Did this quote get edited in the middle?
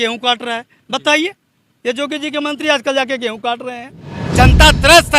yes; 1 cut; at 4.2 s

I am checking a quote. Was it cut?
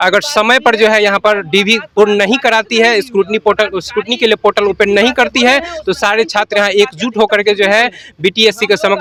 no; 0 cuts

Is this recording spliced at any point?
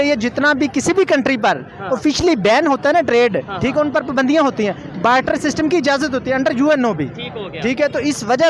no; 0 cuts

